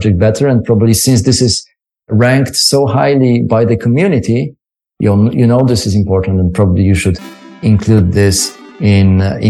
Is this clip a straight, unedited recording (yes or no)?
yes